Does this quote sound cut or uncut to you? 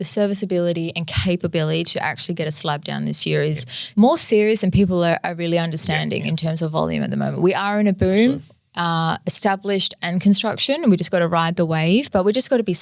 cut